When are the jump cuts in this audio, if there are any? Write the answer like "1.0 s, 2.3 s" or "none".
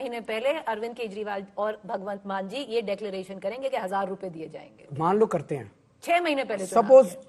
none